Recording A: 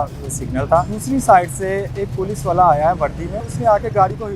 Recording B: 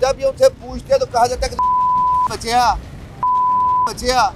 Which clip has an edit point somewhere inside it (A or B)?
A